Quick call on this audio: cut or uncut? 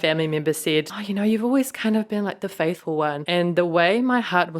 cut